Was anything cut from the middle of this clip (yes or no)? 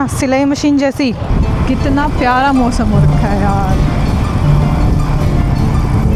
yes